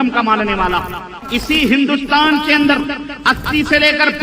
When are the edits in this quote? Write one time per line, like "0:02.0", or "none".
0:01.1

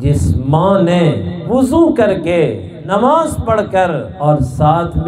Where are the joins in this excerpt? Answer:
0:01.3
0:02.7
0:04.1

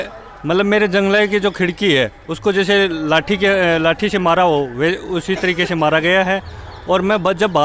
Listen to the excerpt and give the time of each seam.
none

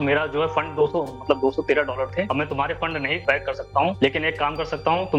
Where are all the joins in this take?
0:02.3
0:03.2

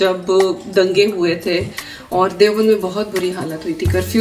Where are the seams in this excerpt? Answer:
none

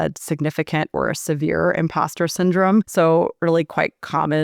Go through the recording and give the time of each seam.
0:02.9

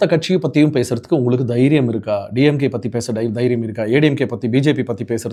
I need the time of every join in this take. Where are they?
none

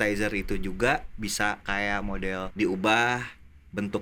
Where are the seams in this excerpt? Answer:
0:02.5

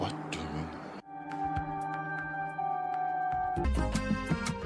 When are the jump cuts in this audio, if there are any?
0:03.7

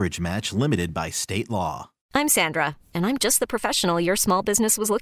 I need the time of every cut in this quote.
0:01.9

